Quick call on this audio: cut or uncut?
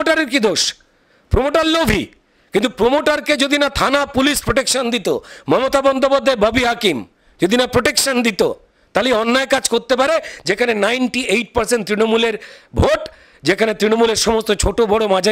uncut